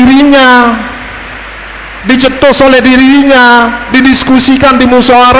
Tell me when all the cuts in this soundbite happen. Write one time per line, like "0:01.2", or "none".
none